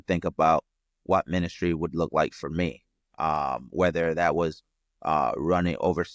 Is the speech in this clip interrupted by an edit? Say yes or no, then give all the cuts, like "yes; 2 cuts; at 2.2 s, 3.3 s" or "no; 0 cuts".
no; 0 cuts